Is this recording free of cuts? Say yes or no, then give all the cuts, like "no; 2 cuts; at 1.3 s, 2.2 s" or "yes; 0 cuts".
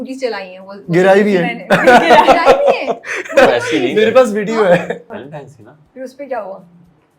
no; 1 cut; at 5.0 s